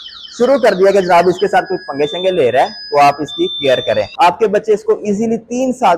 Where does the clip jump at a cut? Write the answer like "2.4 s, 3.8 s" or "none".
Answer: 4.3 s